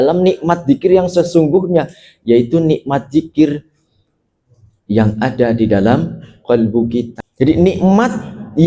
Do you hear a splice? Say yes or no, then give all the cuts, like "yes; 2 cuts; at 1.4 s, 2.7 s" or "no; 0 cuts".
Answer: yes; 1 cut; at 7.2 s